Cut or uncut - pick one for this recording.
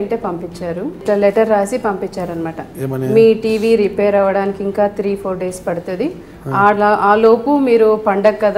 cut